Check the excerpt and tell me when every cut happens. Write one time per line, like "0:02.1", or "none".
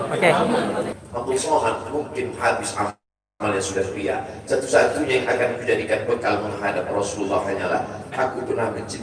0:00.9